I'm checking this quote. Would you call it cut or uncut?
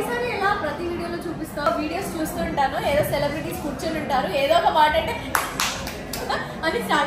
cut